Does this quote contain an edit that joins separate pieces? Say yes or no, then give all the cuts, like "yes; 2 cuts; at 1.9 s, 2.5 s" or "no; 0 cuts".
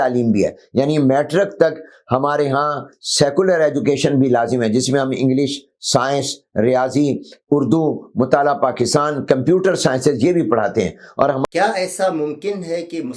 yes; 1 cut; at 11.4 s